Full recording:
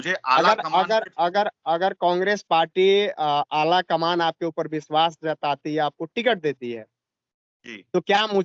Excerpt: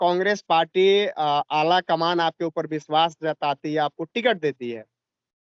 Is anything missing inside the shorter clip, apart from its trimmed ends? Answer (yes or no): no